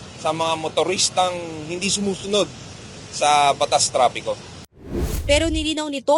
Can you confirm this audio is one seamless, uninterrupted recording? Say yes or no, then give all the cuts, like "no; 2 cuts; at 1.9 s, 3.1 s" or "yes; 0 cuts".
no; 1 cut; at 5.1 s